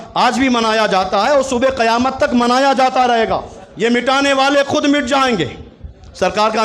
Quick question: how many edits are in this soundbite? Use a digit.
1